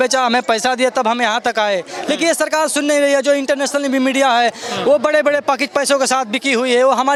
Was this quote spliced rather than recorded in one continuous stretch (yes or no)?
no